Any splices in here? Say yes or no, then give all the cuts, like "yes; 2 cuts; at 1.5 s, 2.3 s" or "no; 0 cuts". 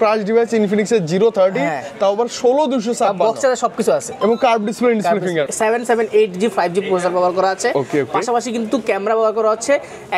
yes; 1 cut; at 5.5 s